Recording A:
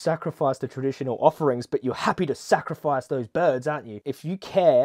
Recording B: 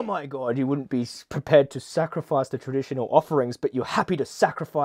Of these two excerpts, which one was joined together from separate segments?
A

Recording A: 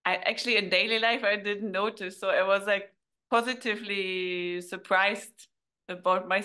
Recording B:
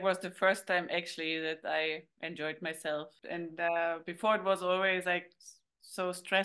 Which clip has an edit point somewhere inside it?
B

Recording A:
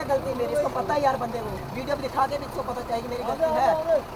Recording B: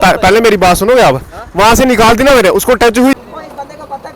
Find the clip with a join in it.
B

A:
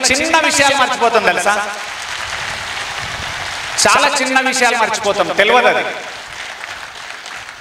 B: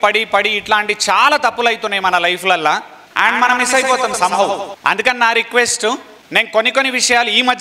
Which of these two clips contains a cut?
B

